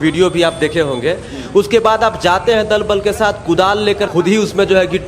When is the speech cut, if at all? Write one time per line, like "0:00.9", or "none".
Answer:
0:04.1